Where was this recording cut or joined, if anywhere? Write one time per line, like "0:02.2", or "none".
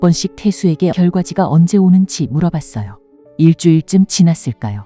0:00.9